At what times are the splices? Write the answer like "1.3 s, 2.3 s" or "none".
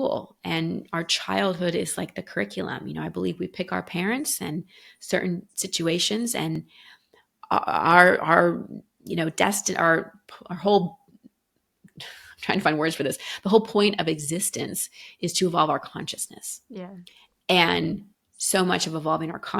none